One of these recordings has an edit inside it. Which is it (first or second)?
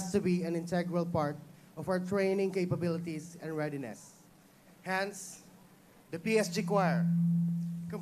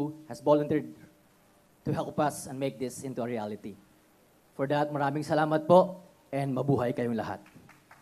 first